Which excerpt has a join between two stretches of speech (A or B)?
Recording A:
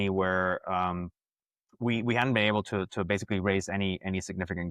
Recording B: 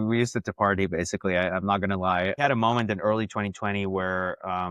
B